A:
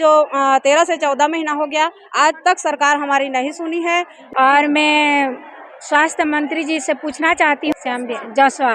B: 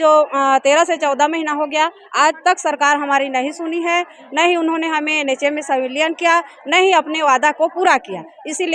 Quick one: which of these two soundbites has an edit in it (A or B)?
A